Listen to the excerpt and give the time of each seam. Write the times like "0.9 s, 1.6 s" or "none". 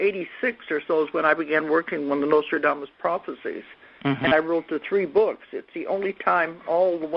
3.3 s